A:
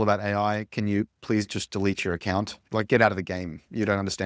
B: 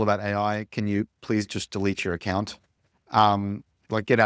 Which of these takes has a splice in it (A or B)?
A